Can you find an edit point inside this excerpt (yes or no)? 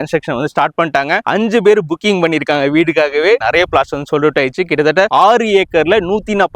no